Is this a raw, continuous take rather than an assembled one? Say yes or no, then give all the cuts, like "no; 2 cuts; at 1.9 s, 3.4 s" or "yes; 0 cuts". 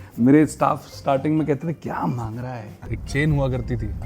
no; 1 cut; at 2.8 s